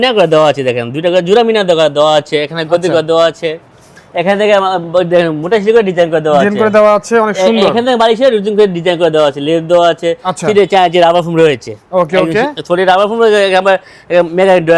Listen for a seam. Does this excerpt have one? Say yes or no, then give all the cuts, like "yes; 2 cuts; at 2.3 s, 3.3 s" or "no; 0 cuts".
no; 0 cuts